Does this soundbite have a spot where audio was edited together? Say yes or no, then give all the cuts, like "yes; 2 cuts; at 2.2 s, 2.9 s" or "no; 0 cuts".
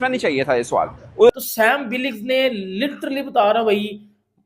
yes; 1 cut; at 1.3 s